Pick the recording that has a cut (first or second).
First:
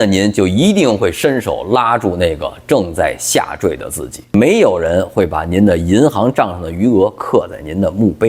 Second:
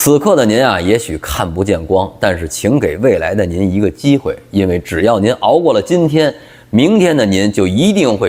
first